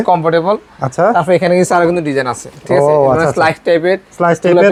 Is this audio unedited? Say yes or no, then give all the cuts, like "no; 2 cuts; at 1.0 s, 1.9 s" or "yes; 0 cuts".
yes; 0 cuts